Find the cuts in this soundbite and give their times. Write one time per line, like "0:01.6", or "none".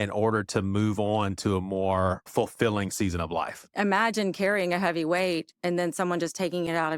0:02.3
0:03.7